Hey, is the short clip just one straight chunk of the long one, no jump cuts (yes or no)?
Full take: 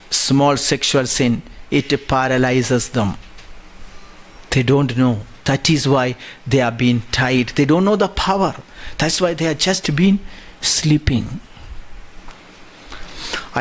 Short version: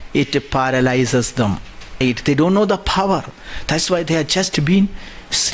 no